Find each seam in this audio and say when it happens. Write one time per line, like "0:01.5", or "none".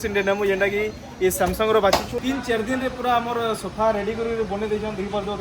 0:02.1

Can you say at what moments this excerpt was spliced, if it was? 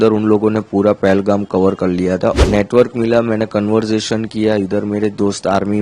0:02.4

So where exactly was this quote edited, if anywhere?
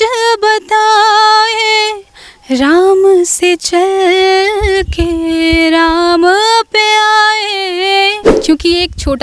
0:08.3

